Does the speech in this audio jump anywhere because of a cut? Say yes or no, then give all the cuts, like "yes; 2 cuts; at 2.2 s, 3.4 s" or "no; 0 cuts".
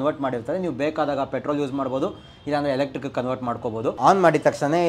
yes; 1 cut; at 3.9 s